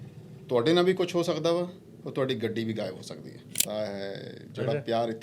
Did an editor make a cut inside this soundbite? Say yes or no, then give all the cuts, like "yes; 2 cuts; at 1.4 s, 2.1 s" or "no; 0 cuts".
yes; 1 cut; at 3.6 s